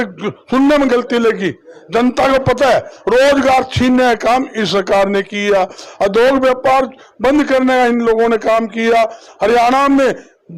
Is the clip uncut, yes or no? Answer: yes